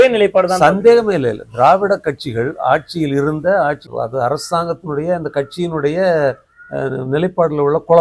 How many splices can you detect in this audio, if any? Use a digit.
1